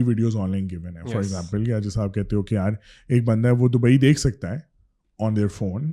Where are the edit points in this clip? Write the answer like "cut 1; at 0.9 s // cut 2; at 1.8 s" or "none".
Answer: none